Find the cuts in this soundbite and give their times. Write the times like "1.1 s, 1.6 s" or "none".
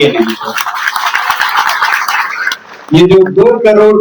none